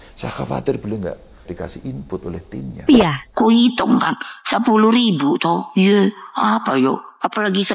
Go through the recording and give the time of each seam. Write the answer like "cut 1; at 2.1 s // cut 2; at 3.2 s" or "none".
cut 1; at 2.8 s